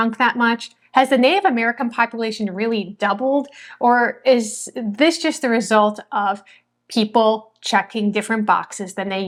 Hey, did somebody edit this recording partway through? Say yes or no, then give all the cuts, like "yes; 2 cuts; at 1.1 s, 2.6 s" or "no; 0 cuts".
no; 0 cuts